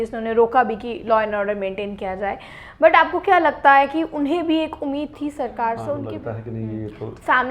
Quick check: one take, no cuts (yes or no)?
no